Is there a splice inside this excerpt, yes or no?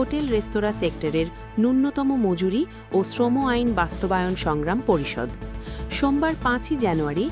no